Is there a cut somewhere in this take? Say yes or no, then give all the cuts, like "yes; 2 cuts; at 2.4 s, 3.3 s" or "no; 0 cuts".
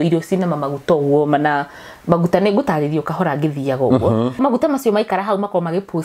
yes; 1 cut; at 4.4 s